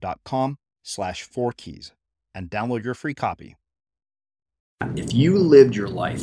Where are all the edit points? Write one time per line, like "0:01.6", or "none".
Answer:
0:04.8